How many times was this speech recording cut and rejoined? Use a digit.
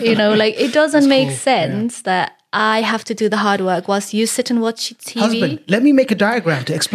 0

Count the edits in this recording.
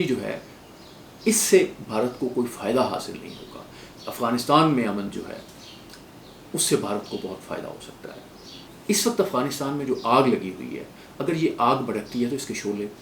2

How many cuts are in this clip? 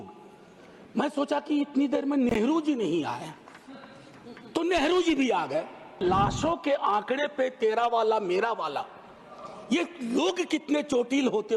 1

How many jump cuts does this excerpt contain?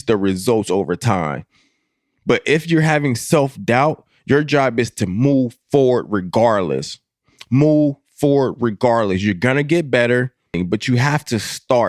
1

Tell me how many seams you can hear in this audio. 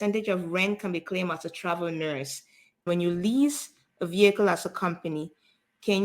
1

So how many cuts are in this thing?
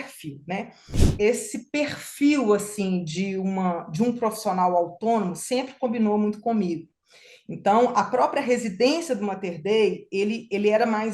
1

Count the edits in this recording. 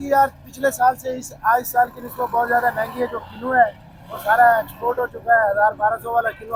0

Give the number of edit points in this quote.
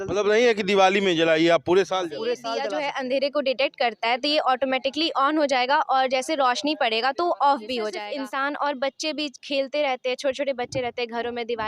2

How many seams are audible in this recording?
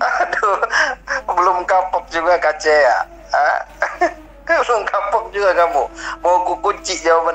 0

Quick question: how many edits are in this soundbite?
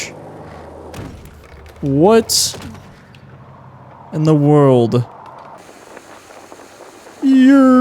1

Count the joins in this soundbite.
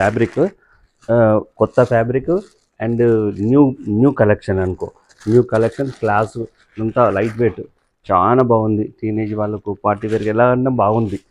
0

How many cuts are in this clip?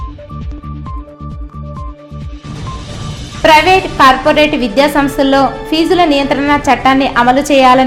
2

